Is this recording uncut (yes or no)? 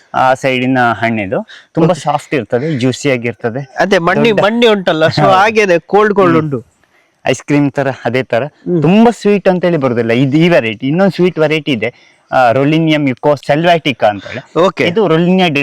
no